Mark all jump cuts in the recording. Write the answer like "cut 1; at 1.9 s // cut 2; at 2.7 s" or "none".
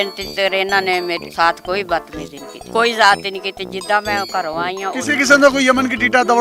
none